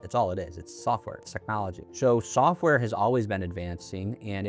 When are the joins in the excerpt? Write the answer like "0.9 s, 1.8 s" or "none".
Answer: 1.8 s